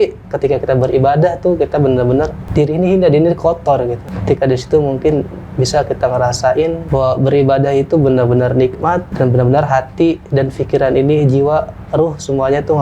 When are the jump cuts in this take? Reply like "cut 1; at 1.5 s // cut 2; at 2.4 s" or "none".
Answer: cut 1; at 2.4 s // cut 2; at 4.1 s // cut 3; at 6.8 s // cut 4; at 9.1 s